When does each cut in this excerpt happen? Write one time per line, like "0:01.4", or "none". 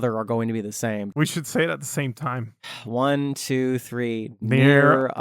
0:01.1

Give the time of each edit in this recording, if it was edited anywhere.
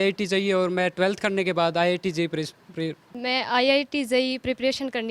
0:03.1

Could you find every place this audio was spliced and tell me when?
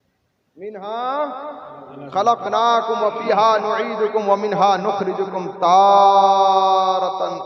none

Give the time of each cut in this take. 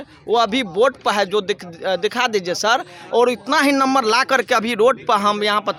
none

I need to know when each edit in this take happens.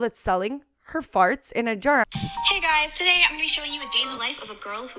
0:02.1

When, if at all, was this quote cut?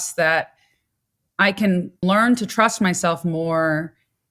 0:02.0

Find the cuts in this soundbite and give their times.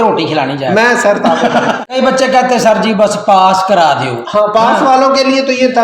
0:01.9

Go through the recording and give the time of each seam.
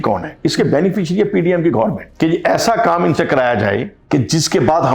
0:02.0
0:03.9

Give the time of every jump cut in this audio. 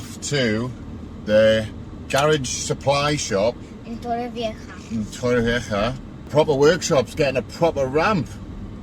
0:06.3

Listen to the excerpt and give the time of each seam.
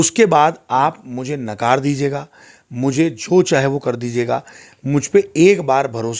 none

